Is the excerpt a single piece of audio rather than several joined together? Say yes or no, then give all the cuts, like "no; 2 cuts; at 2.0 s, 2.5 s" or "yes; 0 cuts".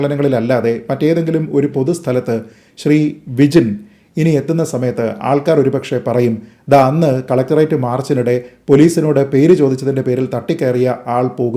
yes; 0 cuts